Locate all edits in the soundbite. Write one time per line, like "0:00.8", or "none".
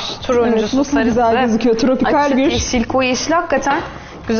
none